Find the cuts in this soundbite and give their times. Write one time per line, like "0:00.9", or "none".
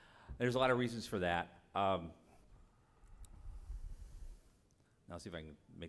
0:02.3